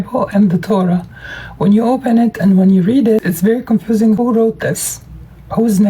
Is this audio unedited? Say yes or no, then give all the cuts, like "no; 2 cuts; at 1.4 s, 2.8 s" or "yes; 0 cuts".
no; 2 cuts; at 3.2 s, 4.2 s